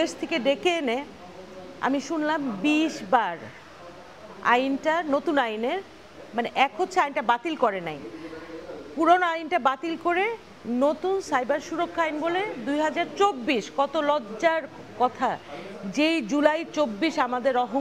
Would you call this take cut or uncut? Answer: uncut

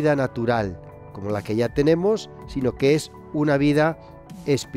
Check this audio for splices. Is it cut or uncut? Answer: uncut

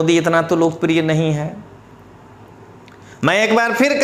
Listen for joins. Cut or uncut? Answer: uncut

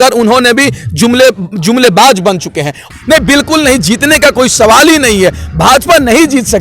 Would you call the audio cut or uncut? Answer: cut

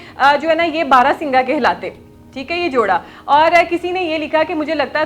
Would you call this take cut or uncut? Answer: uncut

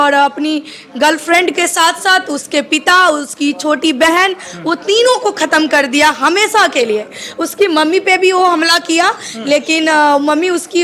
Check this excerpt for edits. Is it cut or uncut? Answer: uncut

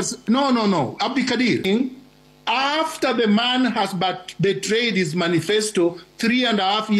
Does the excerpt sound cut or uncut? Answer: cut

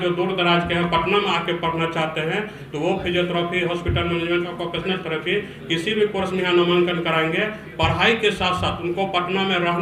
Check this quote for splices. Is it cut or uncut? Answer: uncut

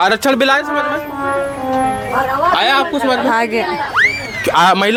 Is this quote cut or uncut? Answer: uncut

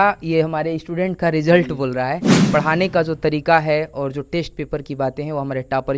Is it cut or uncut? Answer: cut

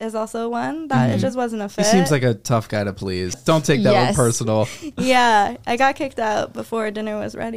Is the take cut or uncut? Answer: cut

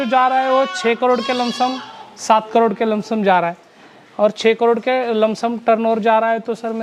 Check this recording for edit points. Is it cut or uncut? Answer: uncut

